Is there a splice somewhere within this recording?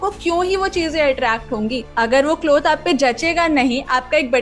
yes; 1 cut; at 1.8 s

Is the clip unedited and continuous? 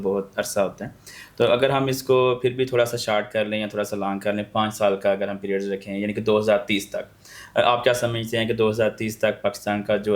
yes; 0 cuts

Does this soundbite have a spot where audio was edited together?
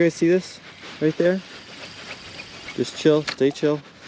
no; 0 cuts

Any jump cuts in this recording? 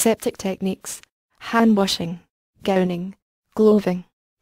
no; 0 cuts

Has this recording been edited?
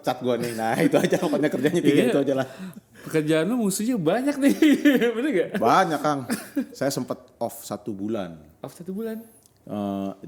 no; 0 cuts

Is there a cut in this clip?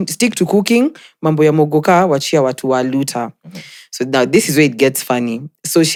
no; 0 cuts

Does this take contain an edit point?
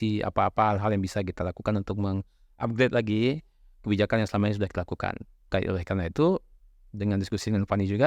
yes; 1 cut; at 5.3 s

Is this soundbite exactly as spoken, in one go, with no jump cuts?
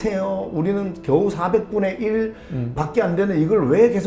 yes; 0 cuts

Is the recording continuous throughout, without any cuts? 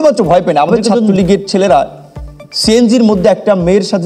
no; 1 cut; at 0.9 s

